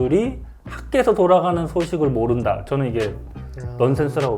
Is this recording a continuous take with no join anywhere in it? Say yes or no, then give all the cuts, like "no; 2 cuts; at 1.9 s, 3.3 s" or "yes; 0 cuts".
yes; 0 cuts